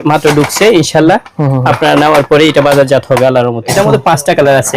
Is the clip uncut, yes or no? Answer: no